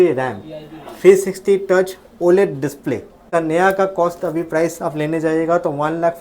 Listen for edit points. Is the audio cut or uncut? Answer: cut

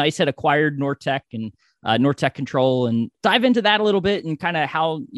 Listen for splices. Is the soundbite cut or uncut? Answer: cut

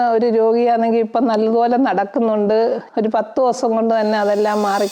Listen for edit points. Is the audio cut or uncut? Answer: cut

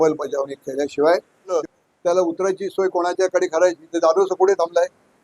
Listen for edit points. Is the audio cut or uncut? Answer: cut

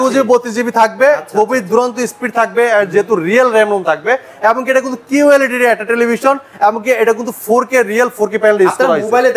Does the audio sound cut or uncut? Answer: uncut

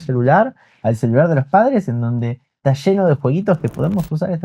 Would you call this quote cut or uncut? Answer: uncut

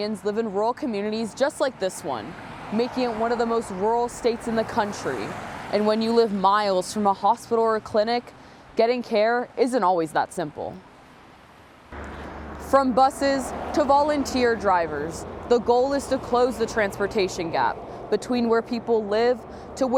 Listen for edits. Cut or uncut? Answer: uncut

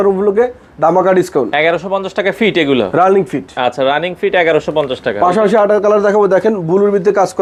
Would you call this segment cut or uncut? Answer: uncut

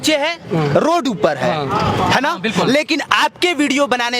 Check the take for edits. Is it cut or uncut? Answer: uncut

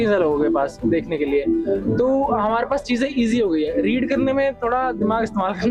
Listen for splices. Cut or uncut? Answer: uncut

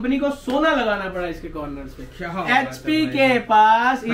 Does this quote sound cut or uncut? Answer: uncut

